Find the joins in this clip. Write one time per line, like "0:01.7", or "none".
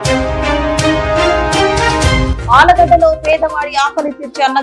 0:02.3